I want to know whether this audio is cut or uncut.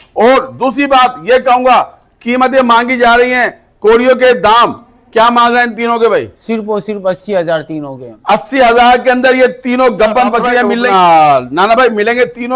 cut